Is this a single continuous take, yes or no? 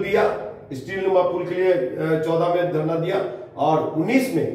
yes